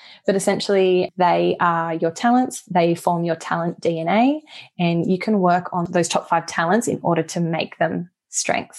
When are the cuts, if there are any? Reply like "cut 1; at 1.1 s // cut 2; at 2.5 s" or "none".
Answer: cut 1; at 1.1 s // cut 2; at 5.9 s